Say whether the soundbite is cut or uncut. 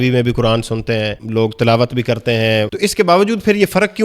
cut